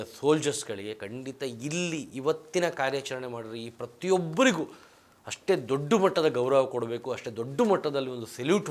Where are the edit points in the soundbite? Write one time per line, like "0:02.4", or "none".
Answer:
none